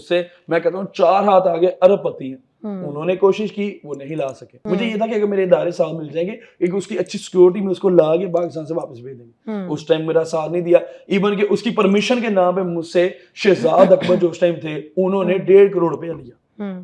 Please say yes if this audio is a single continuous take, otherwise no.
no